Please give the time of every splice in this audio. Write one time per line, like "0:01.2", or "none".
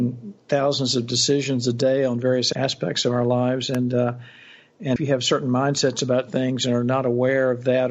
0:02.5
0:05.0